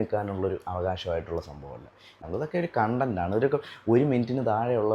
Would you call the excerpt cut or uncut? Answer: cut